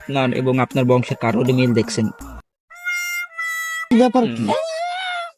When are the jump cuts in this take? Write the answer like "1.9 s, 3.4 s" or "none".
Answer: 3.8 s